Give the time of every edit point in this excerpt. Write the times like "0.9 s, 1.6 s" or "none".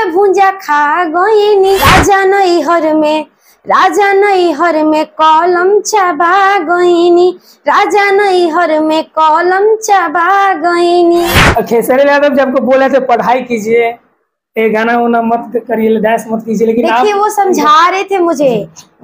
1.9 s, 11.4 s